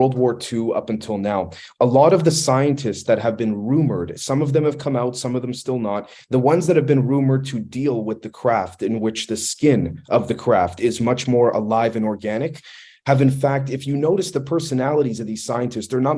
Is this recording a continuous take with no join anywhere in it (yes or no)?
yes